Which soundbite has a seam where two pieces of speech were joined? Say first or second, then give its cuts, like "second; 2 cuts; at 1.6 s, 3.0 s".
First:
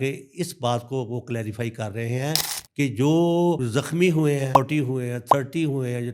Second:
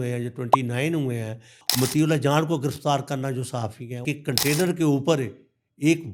second; 2 cuts; at 1.6 s, 4.0 s